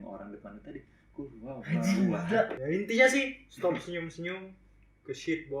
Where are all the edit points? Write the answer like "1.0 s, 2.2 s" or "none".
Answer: 2.6 s

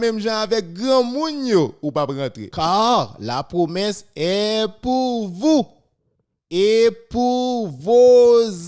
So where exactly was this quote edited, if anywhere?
2.4 s

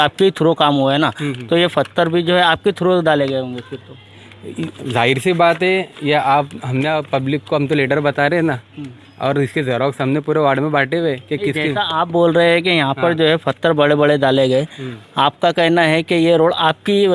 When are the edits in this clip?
none

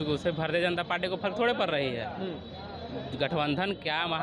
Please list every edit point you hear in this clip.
none

